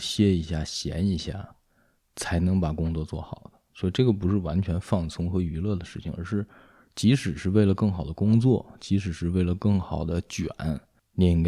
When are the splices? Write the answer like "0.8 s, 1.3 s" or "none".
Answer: none